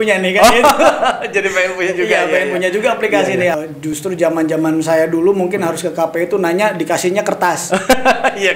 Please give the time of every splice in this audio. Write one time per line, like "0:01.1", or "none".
0:03.5